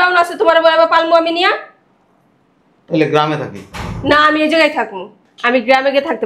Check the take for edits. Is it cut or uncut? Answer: uncut